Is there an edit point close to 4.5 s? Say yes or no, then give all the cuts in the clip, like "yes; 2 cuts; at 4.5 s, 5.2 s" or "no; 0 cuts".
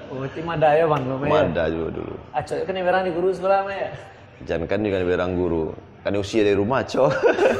no; 0 cuts